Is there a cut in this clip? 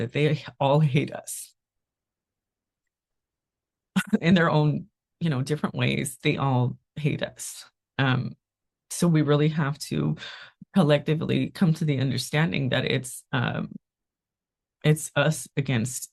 no; 0 cuts

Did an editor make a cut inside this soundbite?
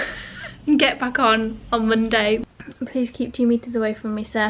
yes; 1 cut; at 2.5 s

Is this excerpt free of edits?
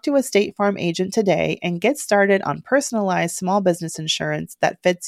yes; 0 cuts

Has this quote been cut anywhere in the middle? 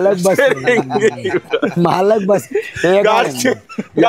no; 0 cuts

